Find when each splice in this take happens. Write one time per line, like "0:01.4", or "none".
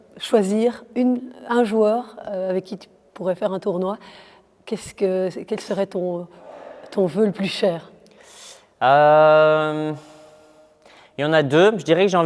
none